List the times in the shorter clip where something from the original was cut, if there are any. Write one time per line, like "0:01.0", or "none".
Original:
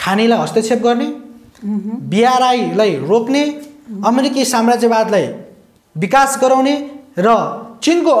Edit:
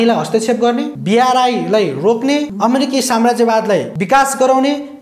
0:01.0
0:02.5
0:03.9